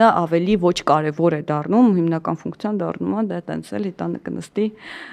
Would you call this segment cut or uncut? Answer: uncut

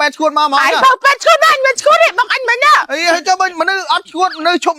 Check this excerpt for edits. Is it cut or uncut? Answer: uncut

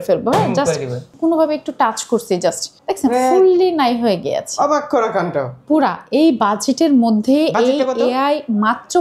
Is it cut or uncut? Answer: cut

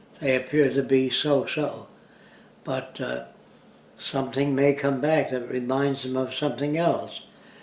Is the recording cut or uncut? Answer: uncut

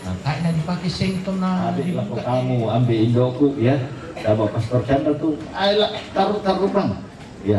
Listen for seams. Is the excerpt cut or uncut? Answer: cut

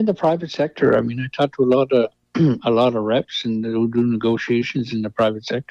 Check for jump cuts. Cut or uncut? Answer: uncut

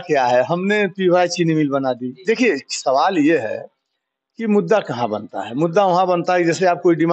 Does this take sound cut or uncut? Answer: uncut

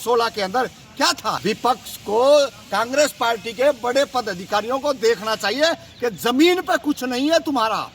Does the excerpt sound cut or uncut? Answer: cut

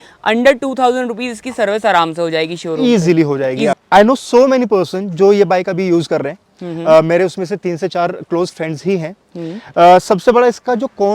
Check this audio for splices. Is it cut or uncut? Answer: cut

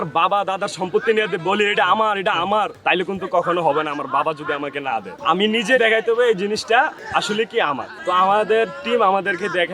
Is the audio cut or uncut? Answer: uncut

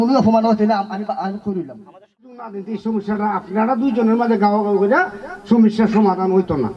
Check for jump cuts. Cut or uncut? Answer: cut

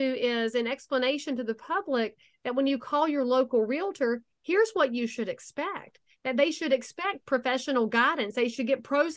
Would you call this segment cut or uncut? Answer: uncut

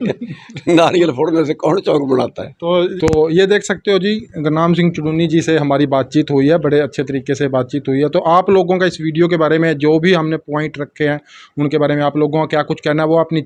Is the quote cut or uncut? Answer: uncut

